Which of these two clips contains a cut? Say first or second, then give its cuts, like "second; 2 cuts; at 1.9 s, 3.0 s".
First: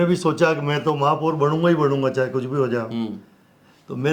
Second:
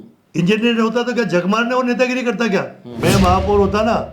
second; 1 cut; at 3.0 s